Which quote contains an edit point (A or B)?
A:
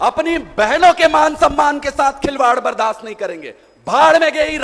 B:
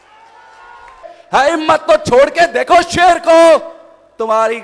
B